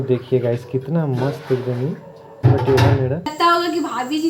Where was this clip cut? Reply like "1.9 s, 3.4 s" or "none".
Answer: 3.3 s